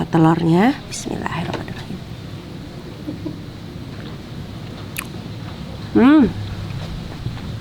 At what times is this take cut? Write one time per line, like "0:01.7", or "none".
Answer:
none